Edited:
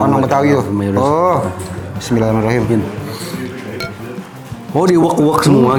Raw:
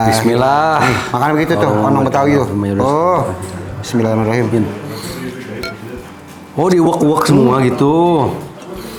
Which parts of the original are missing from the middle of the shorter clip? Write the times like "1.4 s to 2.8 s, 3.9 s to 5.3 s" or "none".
none

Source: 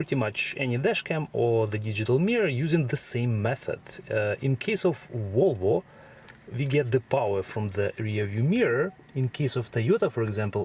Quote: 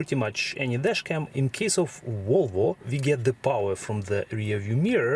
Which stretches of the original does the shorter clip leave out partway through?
1.3 s to 4.4 s, 5.9 s to 6.6 s

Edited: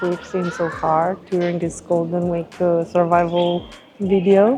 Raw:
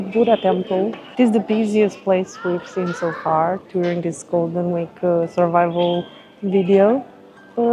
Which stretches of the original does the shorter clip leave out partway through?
none

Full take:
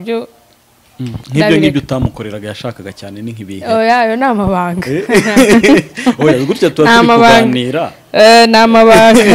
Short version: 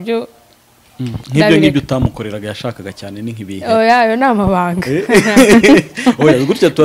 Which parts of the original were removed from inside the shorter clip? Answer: none

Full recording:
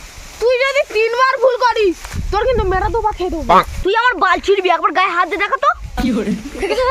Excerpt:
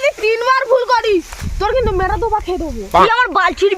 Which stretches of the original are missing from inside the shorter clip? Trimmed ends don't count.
3.5 s to 3.6 s

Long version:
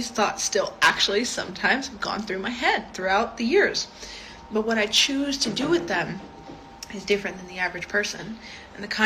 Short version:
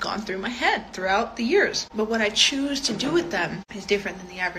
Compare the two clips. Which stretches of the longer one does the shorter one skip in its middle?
3.8 s to 4.4 s, 6.3 s to 6.9 s

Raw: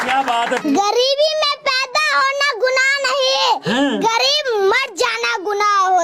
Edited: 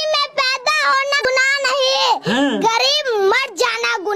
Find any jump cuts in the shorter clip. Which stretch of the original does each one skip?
2.5 s to 2.7 s

